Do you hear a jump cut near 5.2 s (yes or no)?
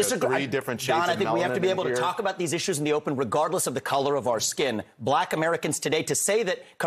yes